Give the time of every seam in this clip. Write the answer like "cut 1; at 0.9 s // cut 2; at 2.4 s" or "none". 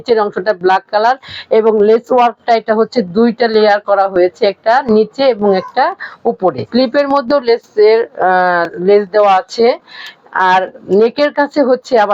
cut 1; at 6.6 s